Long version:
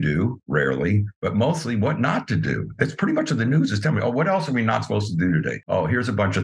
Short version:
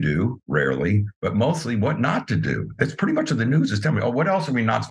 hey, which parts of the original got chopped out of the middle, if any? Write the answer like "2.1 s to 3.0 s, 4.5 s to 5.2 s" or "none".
none